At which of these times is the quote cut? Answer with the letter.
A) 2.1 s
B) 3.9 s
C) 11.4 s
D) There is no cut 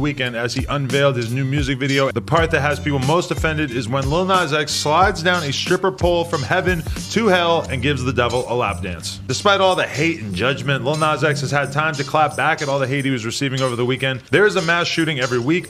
A